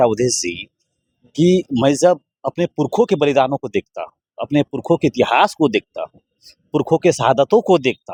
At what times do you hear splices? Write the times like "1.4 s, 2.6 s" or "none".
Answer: none